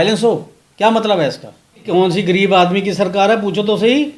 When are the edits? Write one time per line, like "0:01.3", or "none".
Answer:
0:01.8